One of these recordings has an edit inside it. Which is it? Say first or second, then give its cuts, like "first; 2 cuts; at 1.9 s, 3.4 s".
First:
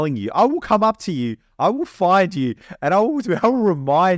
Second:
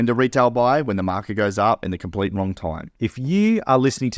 second; 1 cut; at 2.8 s